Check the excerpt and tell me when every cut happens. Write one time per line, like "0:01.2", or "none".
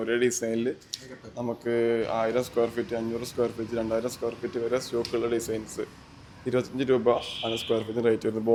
none